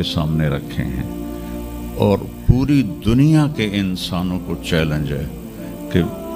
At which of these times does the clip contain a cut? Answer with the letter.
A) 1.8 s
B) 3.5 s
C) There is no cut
C